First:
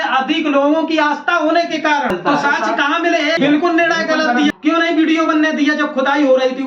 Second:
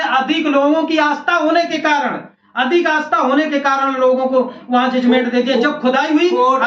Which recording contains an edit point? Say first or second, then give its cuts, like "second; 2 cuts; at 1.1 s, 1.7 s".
first; 3 cuts; at 2.2 s, 3.4 s, 4.6 s